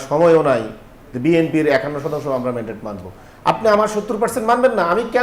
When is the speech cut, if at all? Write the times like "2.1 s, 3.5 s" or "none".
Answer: none